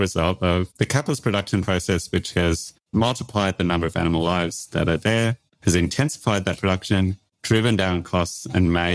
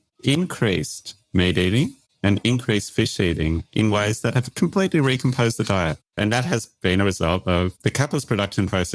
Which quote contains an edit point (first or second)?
second